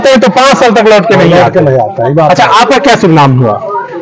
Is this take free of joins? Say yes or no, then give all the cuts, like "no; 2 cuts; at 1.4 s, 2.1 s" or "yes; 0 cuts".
yes; 0 cuts